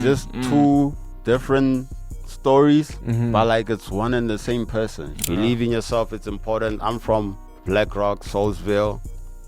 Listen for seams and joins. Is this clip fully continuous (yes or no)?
no